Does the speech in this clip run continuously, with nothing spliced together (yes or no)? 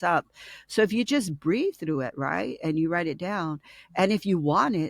yes